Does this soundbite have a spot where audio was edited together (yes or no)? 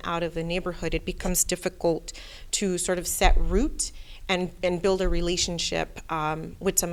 no